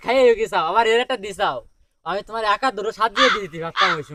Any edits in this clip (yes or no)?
no